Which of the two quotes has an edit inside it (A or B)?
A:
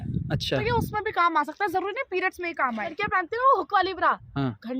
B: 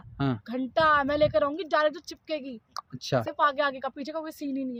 A